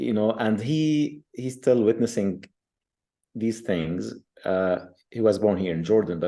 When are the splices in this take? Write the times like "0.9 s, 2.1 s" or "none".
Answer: none